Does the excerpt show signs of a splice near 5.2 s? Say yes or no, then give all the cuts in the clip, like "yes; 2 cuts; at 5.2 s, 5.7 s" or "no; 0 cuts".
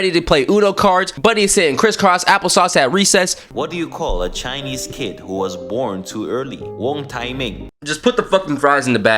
no; 2 cuts; at 3.4 s, 7.6 s